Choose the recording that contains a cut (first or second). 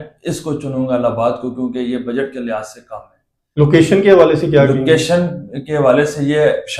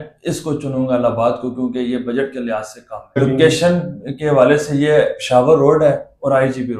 second